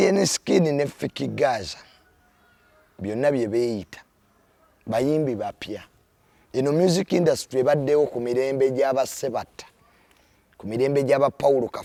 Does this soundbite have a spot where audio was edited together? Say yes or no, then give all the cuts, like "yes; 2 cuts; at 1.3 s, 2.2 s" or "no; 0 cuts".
no; 0 cuts